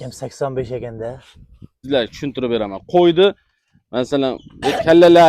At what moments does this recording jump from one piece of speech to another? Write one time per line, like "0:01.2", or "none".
0:01.8